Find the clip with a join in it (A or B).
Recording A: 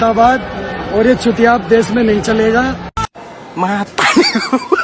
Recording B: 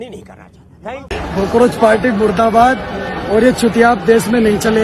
B